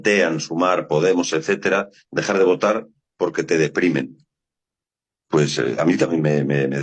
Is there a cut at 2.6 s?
no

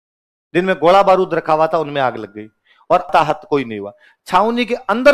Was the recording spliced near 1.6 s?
no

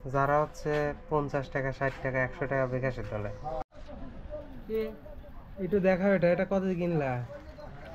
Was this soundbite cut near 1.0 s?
no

